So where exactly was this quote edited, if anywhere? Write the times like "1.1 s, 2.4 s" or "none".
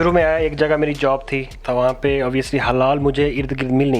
1.6 s